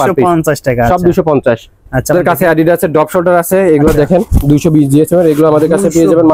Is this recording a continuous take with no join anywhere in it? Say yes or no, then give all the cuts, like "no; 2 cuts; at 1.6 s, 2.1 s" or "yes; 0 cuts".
no; 1 cut; at 2.1 s